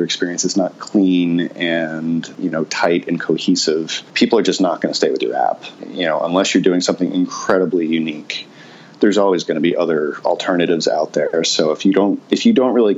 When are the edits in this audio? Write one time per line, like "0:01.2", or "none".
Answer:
none

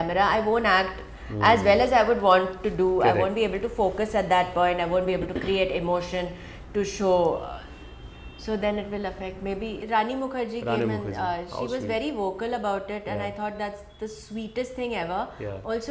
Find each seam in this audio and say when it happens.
0:09.8

